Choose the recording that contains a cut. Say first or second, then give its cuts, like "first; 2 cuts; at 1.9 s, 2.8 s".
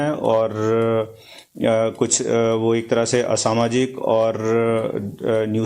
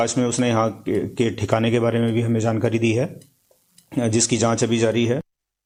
first; 1 cut; at 3.4 s